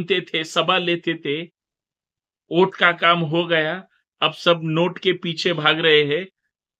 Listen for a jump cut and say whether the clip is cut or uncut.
uncut